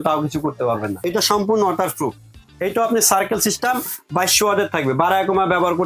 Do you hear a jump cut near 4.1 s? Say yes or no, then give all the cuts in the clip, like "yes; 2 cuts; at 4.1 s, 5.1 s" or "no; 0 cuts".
no; 1 cut; at 1.0 s